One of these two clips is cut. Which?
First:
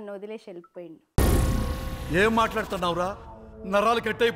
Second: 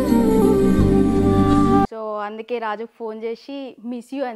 second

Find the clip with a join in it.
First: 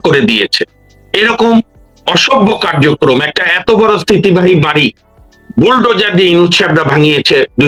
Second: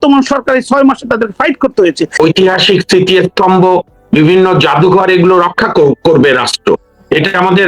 second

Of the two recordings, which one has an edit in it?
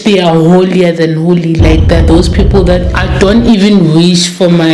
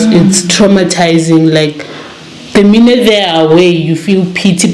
first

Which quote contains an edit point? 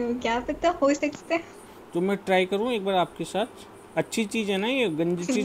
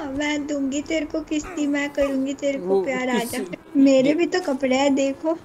second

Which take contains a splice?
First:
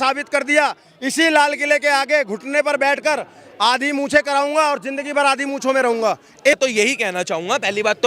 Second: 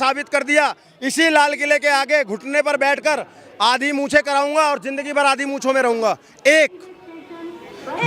first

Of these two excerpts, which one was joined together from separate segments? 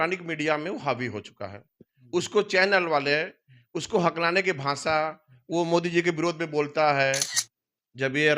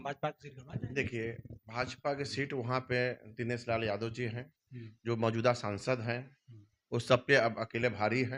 first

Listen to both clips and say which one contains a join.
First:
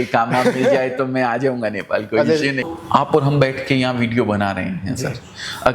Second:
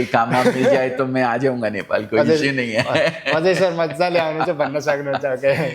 first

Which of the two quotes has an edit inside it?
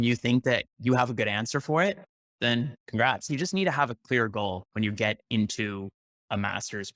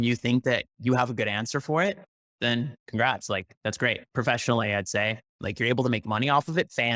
first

